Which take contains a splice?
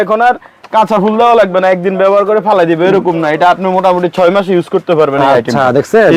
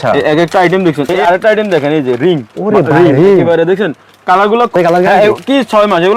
second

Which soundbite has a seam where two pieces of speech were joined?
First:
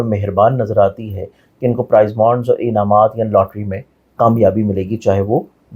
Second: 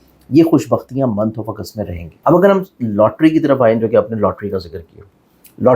second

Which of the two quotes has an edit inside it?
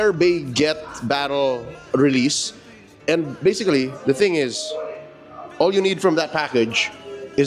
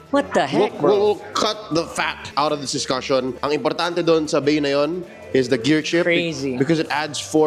second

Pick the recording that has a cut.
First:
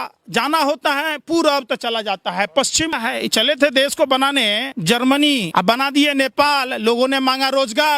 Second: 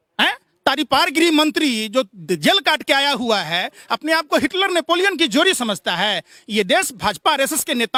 first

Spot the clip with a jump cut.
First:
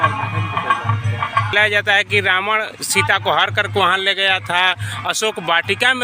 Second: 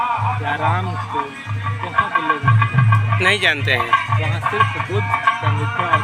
first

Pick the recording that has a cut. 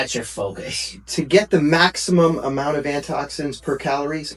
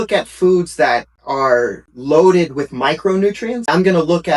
second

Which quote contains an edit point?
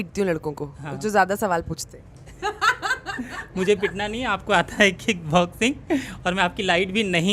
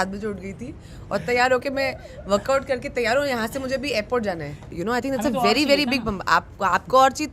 second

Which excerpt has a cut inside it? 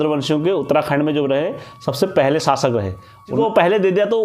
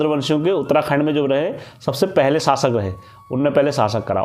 first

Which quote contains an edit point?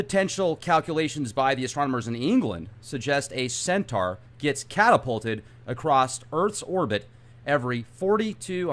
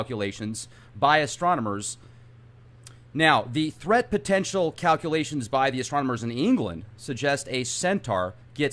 first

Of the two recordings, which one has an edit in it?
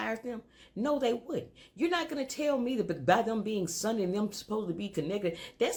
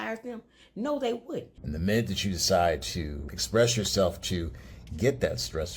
second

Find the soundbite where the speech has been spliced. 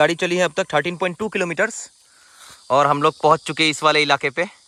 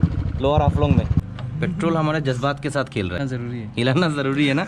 second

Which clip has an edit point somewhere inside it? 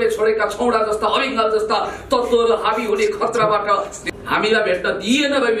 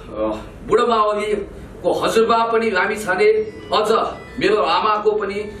first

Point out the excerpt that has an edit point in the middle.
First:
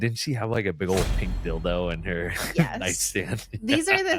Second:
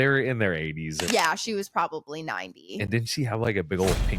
second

